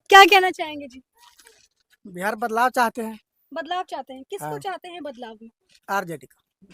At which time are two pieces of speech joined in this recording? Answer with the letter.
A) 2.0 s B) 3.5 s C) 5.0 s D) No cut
D